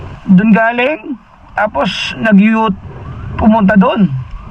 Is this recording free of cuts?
yes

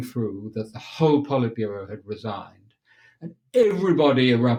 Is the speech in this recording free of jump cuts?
yes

